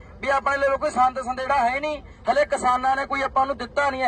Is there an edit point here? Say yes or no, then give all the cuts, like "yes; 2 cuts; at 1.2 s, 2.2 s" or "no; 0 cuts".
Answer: no; 0 cuts